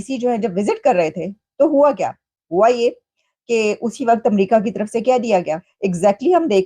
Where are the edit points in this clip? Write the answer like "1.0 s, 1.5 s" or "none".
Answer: 5.7 s